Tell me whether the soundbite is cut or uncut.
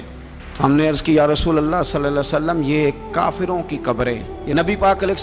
cut